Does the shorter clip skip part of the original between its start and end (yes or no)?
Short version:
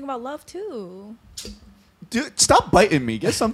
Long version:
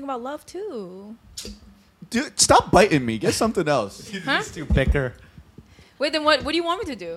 no